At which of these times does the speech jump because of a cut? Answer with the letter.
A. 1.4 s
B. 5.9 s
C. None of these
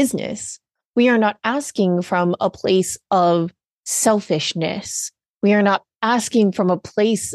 B